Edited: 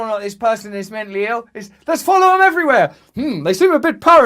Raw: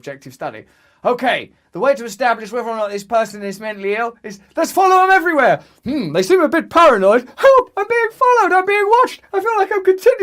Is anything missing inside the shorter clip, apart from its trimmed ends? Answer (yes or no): no